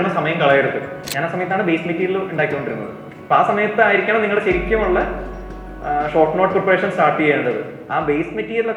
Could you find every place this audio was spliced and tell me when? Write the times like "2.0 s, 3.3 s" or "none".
1.1 s